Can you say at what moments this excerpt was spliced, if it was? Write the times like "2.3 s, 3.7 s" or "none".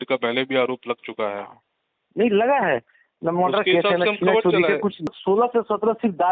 5.2 s